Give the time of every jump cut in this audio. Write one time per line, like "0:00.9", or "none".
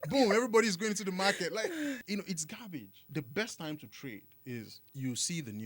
0:02.0
0:03.1
0:04.8